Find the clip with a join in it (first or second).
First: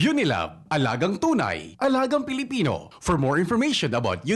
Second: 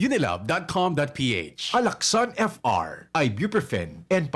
second